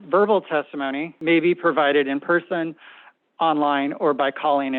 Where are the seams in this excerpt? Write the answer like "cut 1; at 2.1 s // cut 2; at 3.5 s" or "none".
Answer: cut 1; at 1.1 s